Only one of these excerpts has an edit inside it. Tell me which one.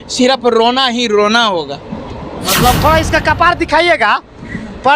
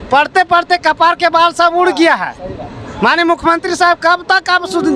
first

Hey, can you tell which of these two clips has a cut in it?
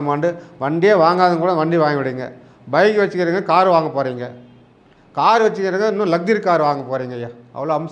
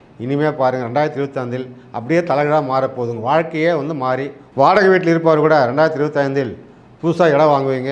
second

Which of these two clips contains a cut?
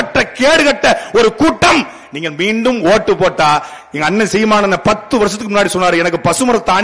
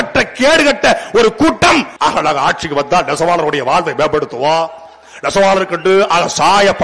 second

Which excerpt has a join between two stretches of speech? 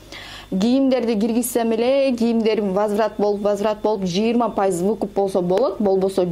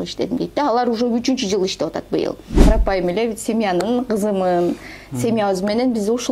second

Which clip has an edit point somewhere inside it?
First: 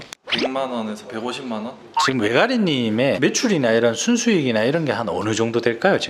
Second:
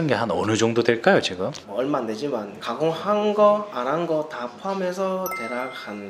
first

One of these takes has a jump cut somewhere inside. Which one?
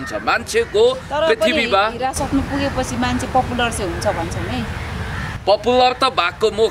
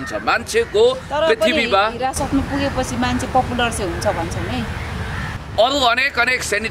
second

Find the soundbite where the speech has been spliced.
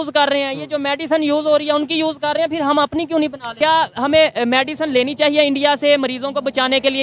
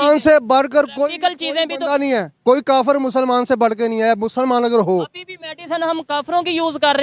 first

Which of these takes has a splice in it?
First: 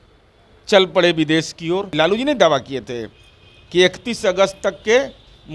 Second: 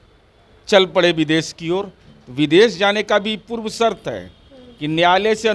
first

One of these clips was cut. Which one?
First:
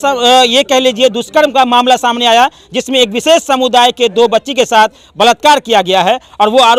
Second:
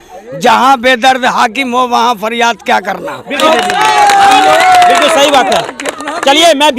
second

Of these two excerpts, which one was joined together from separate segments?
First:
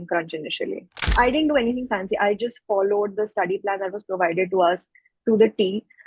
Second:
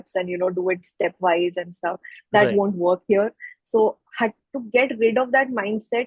first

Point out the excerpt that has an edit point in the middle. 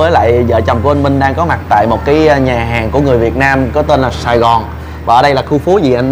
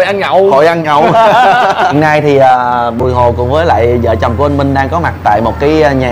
second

